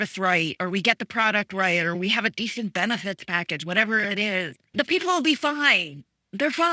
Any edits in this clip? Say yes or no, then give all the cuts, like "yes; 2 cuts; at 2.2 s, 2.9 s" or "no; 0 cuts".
yes; 2 cuts; at 2.0 s, 4.6 s